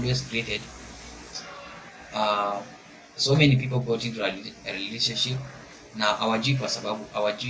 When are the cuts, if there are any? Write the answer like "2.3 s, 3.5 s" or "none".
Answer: 1.4 s

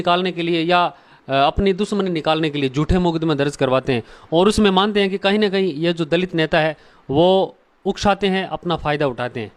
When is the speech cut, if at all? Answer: none

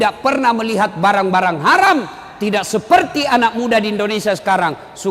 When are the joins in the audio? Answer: none

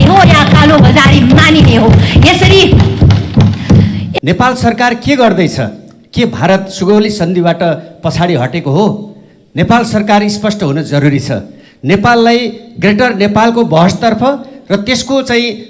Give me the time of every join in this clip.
4.1 s

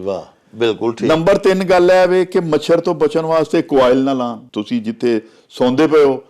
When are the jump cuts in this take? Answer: 4.4 s

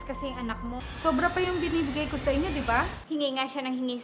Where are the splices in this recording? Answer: 0.8 s, 3.0 s

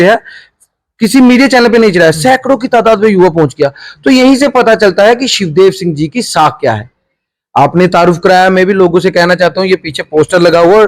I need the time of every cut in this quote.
none

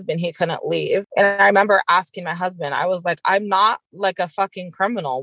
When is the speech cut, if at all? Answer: 1.1 s, 3.9 s

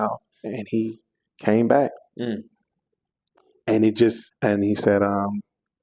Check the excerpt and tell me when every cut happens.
4.3 s

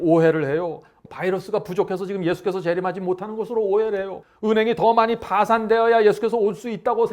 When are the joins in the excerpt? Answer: 0.9 s, 4.2 s

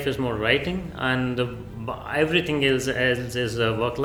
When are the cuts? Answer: none

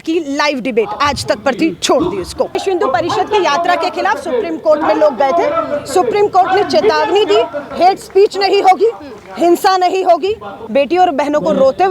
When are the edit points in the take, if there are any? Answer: 2.6 s, 10.6 s

